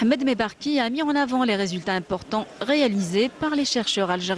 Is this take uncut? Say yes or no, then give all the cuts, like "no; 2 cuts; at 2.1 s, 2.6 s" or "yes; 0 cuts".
yes; 0 cuts